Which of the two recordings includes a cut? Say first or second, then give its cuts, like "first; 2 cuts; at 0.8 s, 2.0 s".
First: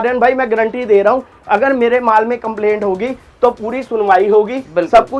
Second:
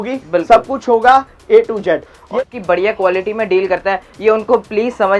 second; 1 cut; at 2.3 s